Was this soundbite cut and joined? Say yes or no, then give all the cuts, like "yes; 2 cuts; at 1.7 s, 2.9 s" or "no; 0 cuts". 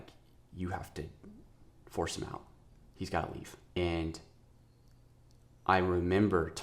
no; 0 cuts